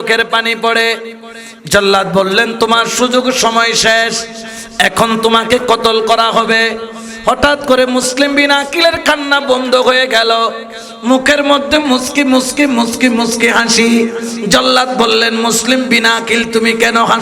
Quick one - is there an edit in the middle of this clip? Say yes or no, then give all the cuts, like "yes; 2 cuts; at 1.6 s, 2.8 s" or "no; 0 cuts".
no; 0 cuts